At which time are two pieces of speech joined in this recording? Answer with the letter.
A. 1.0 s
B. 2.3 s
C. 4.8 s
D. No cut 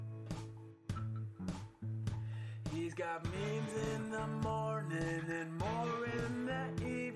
D